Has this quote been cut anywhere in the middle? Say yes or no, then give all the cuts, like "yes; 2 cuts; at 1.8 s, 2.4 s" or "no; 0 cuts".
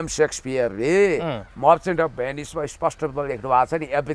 no; 0 cuts